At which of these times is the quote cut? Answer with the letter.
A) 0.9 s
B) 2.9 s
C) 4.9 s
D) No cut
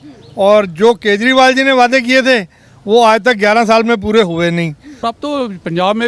C